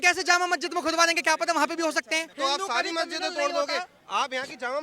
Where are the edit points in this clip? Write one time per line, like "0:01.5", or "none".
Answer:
0:02.3